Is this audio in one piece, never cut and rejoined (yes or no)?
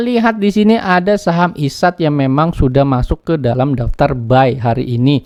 yes